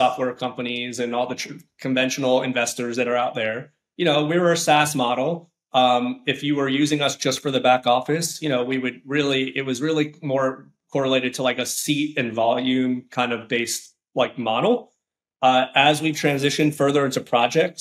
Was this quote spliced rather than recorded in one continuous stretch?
no; 0 cuts

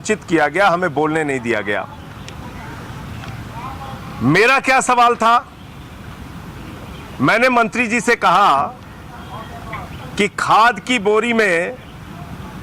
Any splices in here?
no; 0 cuts

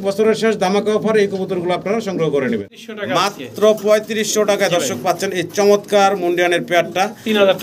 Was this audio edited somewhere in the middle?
yes; 1 cut; at 2.7 s

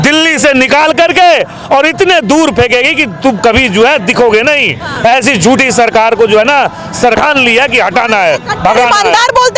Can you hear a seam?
no; 0 cuts

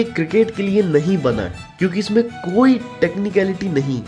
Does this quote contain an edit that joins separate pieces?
no; 0 cuts

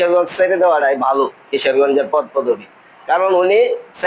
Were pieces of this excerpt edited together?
no; 0 cuts

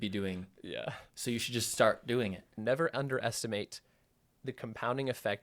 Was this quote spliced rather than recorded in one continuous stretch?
yes; 1 cut; at 2.5 s

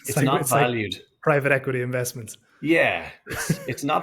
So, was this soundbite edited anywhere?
no; 0 cuts

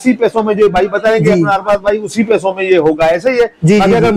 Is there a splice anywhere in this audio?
no; 0 cuts

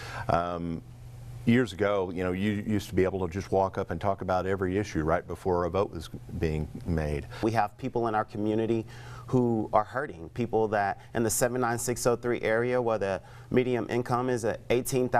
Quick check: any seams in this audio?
yes; 1 cut; at 7.4 s

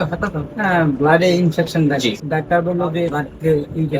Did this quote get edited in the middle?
yes; 2 cuts; at 2.2 s, 3.2 s

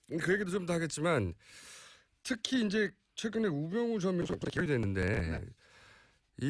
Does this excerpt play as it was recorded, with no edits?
no; 1 cut; at 2.6 s

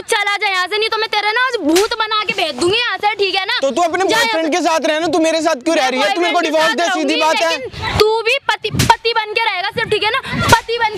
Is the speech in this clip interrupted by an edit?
no; 0 cuts

